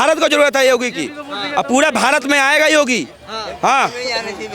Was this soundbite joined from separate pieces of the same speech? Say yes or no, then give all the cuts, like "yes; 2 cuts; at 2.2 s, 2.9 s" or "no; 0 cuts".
no; 0 cuts